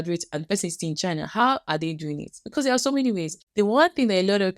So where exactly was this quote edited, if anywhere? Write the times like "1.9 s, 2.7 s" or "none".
3.4 s

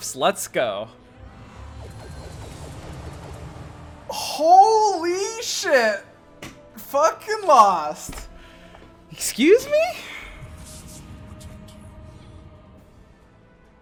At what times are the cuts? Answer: none

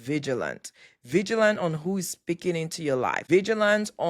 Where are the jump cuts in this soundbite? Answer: 3.2 s

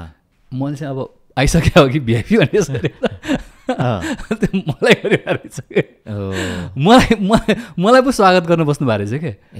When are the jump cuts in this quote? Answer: none

